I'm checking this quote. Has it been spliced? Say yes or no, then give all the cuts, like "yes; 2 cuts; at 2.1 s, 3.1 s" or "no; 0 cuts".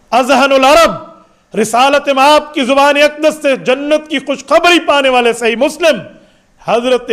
no; 0 cuts